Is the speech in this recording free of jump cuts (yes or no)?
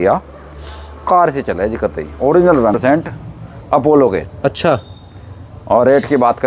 no